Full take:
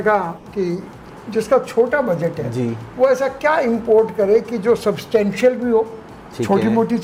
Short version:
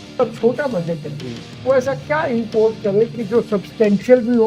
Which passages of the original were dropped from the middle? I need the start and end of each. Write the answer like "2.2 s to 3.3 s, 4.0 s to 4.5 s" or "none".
none

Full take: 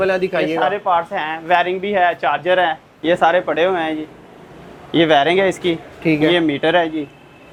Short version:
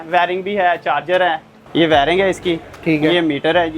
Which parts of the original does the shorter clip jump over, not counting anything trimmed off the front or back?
2.9 s to 4.7 s

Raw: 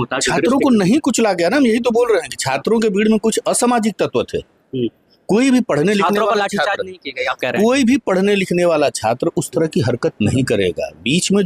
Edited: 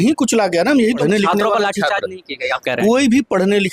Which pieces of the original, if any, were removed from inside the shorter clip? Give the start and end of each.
1.8 s to 5.7 s

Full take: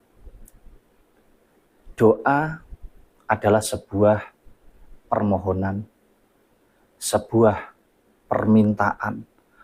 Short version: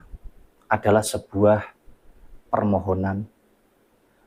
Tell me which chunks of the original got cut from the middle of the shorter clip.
none

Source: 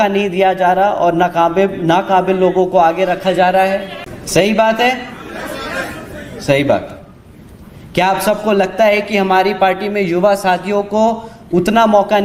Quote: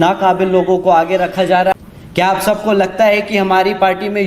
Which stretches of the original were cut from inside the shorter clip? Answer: 3.6 s to 7.5 s

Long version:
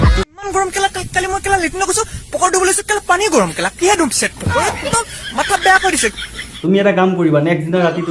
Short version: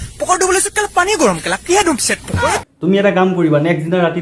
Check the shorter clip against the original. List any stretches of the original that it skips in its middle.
4.8 s to 6.5 s

